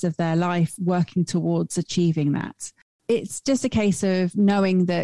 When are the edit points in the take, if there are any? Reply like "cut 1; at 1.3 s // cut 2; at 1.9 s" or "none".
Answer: cut 1; at 2.9 s